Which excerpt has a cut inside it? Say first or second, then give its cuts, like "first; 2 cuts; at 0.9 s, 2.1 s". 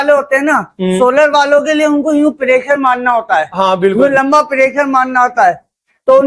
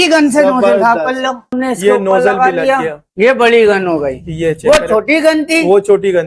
second; 2 cuts; at 1.5 s, 3.0 s